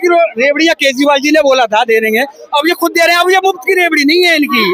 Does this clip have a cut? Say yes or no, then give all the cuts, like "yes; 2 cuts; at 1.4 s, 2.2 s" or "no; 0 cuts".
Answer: no; 0 cuts